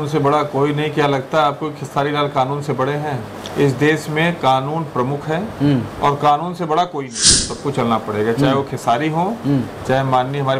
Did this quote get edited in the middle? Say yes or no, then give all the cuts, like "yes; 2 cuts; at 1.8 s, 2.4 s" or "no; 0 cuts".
yes; 1 cut; at 7.5 s